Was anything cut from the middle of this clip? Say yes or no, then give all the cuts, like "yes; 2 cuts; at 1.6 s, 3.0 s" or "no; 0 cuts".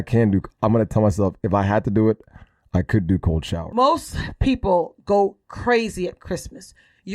yes; 1 cut; at 3.6 s